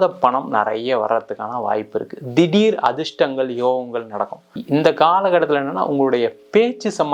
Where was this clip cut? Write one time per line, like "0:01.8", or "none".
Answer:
0:04.5